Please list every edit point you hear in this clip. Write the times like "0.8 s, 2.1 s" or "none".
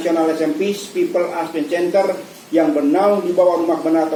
none

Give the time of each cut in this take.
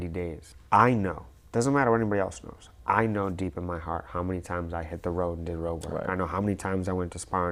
none

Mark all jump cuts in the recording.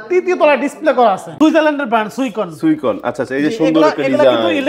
1.3 s

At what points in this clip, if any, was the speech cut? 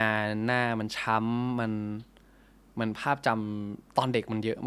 none

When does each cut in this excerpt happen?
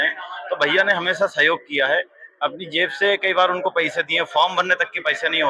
none

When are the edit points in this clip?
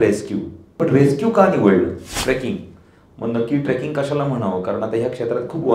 0.8 s, 2.1 s

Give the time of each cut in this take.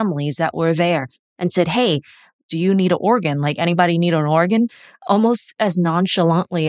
2.4 s

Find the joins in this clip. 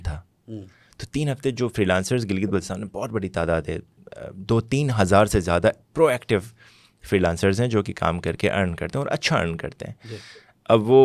none

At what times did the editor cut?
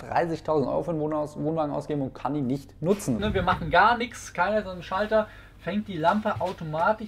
3.2 s

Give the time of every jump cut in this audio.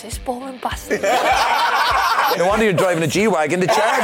2.3 s

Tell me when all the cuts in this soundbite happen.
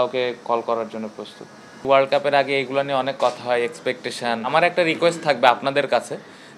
1.8 s, 4.5 s

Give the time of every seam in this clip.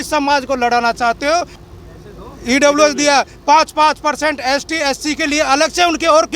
1.5 s

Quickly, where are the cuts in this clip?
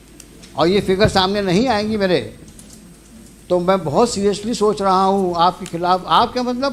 none

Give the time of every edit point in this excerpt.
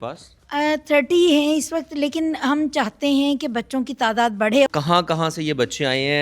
4.7 s

